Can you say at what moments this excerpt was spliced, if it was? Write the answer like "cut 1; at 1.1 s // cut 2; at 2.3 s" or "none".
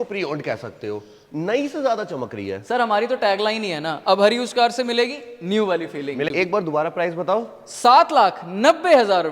cut 1; at 6.3 s